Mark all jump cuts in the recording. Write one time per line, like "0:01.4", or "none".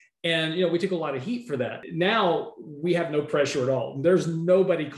0:01.8